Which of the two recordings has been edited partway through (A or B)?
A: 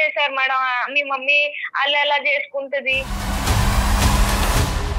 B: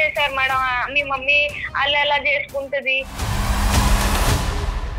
B